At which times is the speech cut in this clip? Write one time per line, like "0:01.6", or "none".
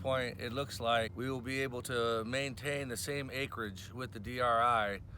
0:01.1